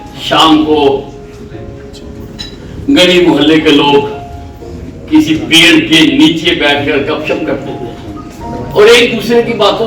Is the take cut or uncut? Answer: cut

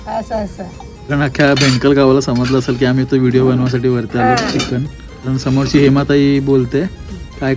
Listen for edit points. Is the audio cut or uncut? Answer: cut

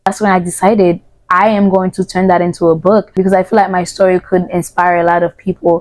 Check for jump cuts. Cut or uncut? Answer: cut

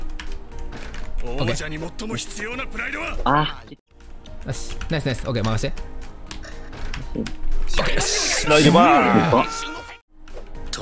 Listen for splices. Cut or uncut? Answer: cut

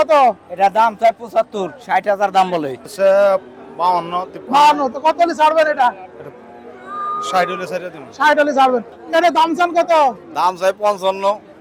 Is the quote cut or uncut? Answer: cut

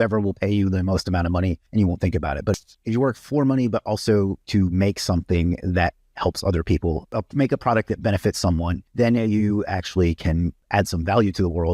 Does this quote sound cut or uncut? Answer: cut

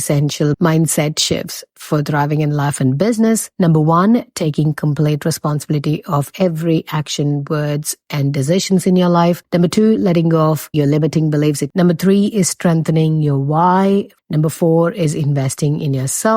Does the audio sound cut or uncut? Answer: cut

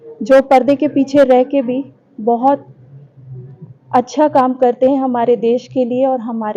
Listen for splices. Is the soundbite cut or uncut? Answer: uncut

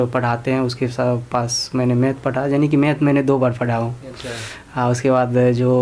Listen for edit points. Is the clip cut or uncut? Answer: uncut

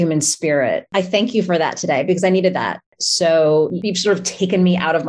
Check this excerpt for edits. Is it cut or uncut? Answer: cut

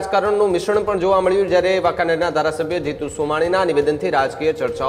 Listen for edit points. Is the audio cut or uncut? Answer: uncut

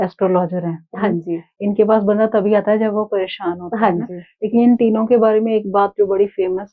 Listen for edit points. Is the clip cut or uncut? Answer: uncut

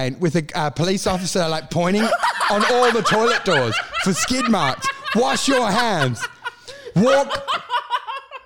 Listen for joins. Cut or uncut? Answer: uncut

